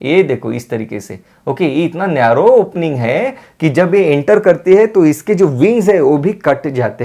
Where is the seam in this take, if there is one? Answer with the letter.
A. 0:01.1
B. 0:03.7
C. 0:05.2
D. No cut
D